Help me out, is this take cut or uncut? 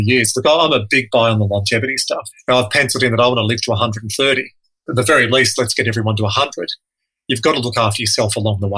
cut